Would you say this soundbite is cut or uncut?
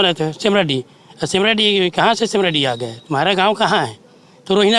uncut